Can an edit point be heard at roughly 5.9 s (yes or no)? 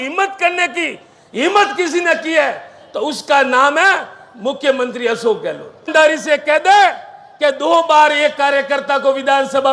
yes